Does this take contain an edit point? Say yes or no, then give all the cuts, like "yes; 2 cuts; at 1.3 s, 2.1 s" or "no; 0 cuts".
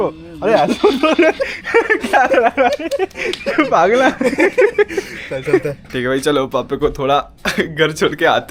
no; 0 cuts